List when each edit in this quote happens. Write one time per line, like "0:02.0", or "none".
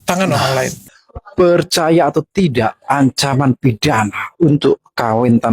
0:00.9